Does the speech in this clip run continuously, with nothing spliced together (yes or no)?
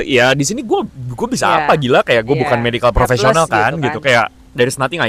yes